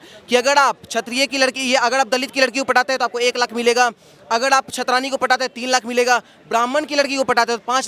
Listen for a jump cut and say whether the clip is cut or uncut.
uncut